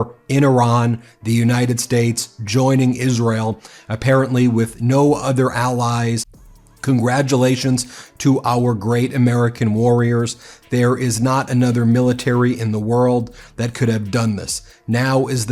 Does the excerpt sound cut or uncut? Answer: cut